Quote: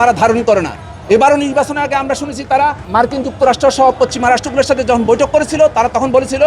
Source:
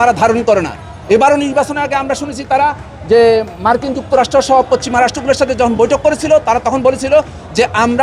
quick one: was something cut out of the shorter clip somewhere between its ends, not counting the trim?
yes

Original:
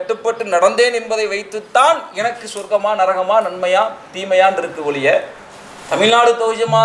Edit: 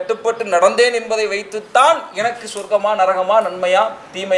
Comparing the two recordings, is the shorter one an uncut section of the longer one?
yes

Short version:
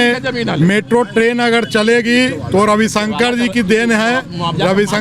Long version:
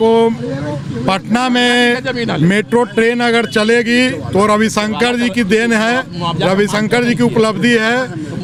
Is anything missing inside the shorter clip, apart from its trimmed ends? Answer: no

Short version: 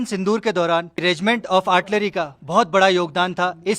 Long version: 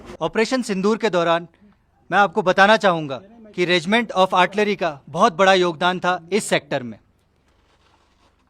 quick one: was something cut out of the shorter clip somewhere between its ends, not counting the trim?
yes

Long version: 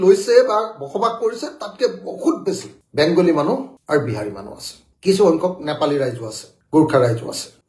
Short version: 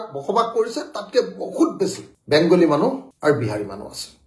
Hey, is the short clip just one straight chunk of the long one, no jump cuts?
yes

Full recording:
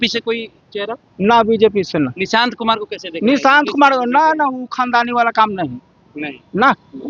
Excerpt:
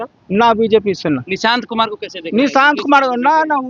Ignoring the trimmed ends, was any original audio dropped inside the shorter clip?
no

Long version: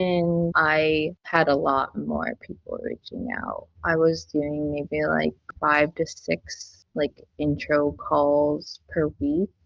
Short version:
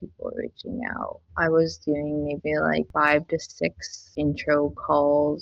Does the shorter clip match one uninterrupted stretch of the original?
no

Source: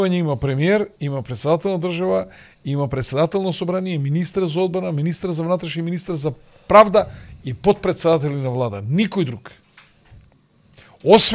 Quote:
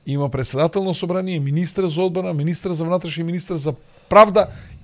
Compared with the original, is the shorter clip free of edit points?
yes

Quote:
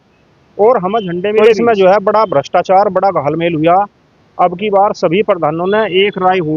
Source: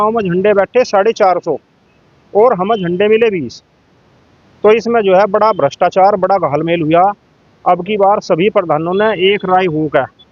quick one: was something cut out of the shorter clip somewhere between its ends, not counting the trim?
yes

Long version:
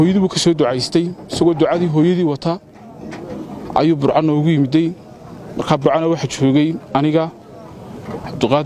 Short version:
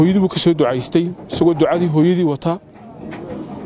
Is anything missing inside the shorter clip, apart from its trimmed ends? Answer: no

